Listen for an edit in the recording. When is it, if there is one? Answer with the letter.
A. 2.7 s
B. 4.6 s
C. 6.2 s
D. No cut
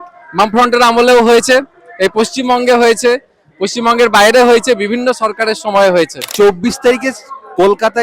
C